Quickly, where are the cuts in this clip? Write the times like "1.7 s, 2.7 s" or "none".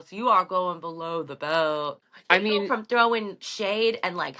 2.0 s